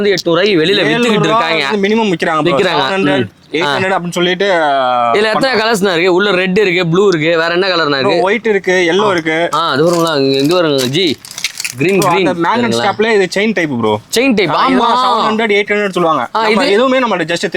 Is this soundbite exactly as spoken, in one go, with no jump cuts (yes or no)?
yes